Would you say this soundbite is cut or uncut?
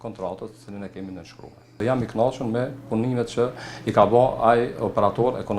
cut